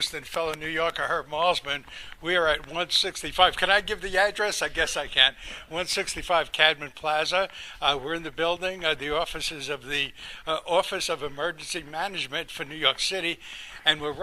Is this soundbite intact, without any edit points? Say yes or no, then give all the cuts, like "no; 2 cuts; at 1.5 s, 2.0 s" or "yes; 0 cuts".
yes; 0 cuts